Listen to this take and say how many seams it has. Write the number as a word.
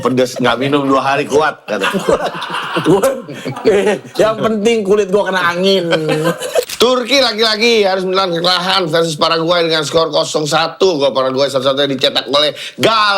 one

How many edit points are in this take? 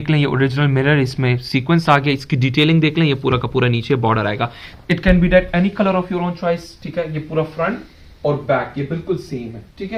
zero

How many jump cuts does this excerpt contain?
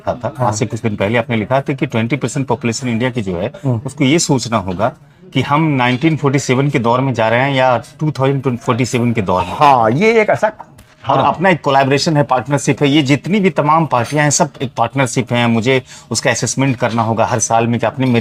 zero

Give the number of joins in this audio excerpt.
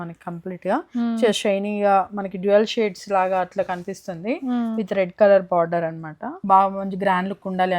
one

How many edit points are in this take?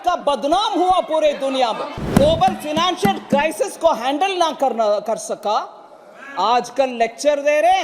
one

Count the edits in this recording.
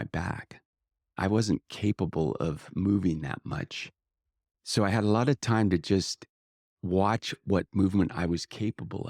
one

